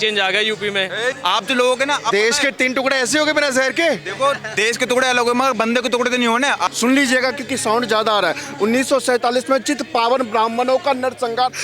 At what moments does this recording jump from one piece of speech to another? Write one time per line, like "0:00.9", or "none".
0:01.2
0:06.6